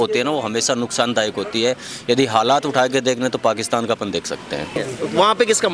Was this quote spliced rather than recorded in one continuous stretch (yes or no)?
yes